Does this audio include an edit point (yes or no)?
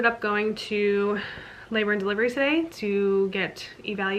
no